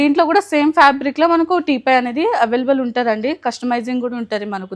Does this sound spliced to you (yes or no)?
no